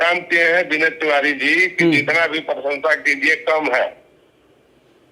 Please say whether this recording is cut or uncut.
uncut